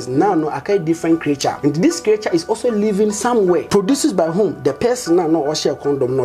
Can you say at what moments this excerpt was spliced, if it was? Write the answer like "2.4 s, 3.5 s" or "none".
1.6 s, 3.7 s